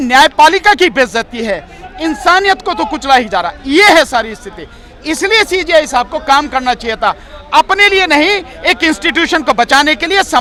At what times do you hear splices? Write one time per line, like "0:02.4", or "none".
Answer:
none